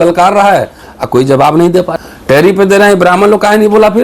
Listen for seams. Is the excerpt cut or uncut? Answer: cut